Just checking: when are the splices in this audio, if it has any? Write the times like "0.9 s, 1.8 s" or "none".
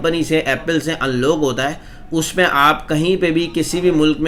none